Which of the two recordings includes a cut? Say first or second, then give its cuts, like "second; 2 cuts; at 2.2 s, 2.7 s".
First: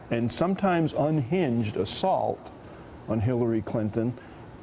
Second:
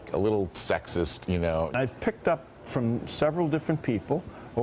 second; 1 cut; at 1.7 s